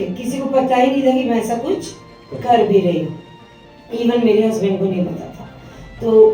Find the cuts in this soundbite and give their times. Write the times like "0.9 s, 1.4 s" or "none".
none